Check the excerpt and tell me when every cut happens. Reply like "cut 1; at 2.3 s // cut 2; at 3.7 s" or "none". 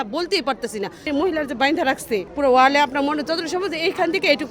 cut 1; at 1.1 s // cut 2; at 2.3 s

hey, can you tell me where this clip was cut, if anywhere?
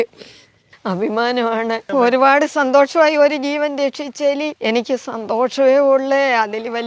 cut 1; at 1.8 s // cut 2; at 4.5 s

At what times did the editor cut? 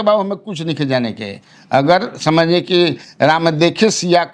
none

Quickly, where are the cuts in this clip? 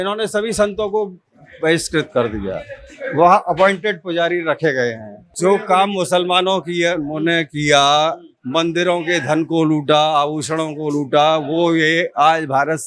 cut 1; at 5.2 s

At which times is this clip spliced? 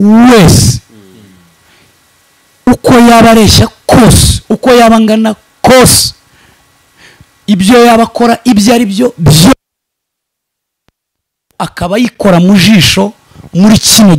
none

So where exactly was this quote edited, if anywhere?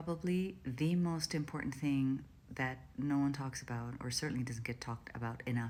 none

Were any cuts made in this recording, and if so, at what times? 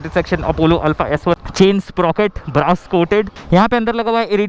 cut 1; at 1.4 s // cut 2; at 3.4 s

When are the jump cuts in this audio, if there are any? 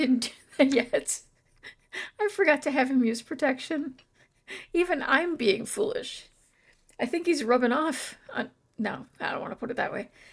none

